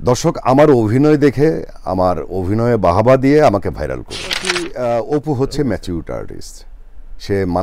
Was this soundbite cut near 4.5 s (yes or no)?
yes